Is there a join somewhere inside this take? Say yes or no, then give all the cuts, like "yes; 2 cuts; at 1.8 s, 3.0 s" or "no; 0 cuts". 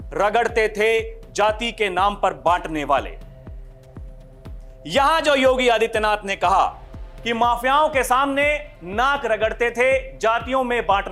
no; 0 cuts